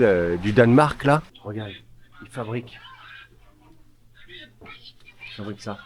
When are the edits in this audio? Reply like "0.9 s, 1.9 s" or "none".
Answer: 1.4 s